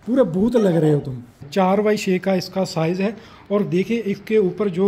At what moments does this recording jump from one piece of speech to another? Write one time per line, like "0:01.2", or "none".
0:01.4